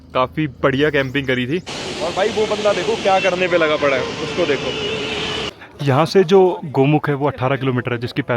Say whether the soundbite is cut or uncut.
cut